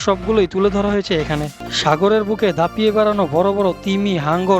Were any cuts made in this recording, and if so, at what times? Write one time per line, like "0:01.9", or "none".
0:01.5